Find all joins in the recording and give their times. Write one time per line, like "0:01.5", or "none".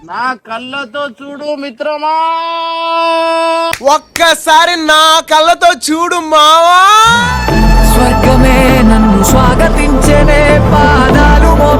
none